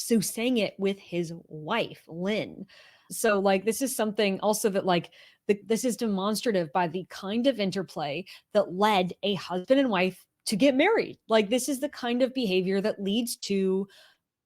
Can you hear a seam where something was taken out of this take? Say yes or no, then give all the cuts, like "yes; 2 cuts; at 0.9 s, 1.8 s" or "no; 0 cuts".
no; 0 cuts